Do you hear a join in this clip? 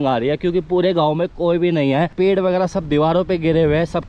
yes; 1 cut; at 2.1 s

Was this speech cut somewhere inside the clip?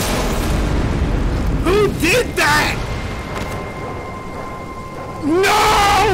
no; 0 cuts

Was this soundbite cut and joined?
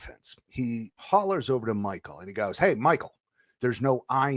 yes; 1 cut; at 1.0 s

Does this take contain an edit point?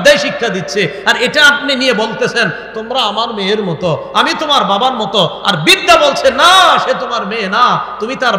no; 0 cuts

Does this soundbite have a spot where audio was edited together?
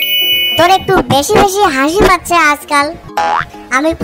yes; 1 cut; at 3.0 s

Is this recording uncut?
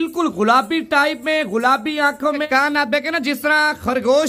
no; 1 cut; at 2.4 s

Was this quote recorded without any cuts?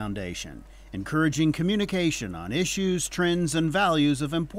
yes; 0 cuts

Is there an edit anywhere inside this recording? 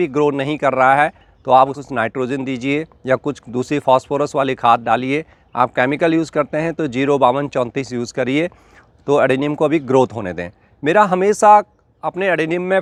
no; 0 cuts

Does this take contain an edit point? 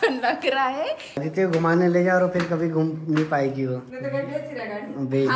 yes; 2 cuts; at 1.2 s, 3.9 s

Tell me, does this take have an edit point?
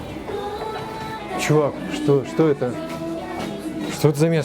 yes; 1 cut; at 1.2 s

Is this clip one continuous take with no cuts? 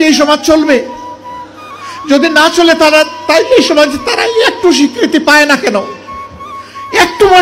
yes; 0 cuts

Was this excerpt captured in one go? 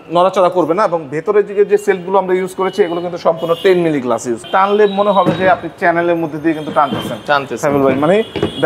no; 1 cut; at 4.4 s

